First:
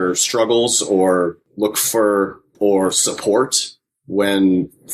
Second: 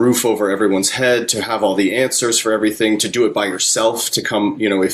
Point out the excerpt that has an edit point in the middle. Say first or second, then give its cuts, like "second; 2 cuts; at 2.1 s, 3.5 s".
first; 2 cuts; at 1.4 s, 2.5 s